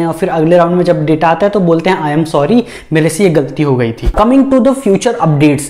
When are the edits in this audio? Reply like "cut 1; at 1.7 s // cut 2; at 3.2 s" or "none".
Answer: cut 1; at 4.1 s